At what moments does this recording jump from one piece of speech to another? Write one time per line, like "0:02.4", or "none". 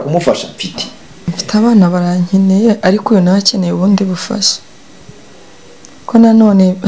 0:01.4